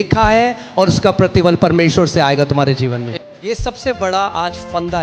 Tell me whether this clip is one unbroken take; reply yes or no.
no